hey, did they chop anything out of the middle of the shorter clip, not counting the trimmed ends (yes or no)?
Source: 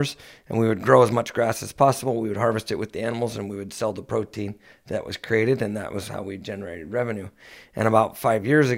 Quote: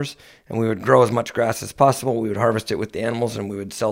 no